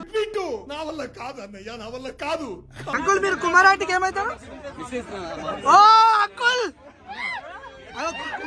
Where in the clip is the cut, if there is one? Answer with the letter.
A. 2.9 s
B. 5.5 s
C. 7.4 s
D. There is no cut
A